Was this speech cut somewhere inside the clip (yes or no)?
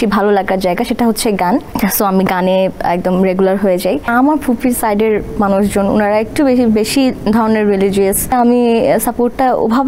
yes